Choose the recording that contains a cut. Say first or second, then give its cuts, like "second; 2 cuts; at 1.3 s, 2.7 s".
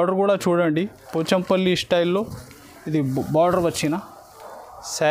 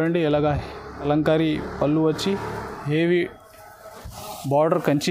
second; 1 cut; at 1.1 s